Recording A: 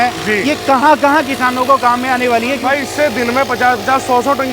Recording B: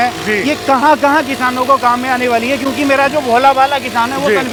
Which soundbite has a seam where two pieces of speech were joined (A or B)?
A